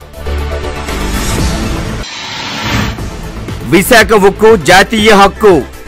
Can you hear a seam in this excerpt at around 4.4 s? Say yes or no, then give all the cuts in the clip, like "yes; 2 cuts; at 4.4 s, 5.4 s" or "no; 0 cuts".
no; 1 cut; at 1.9 s